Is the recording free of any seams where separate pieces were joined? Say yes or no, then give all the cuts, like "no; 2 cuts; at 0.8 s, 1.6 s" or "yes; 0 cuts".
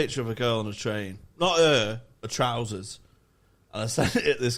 yes; 0 cuts